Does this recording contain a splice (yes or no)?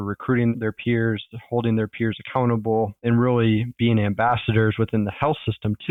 no